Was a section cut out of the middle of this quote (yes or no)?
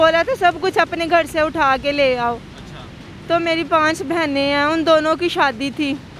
no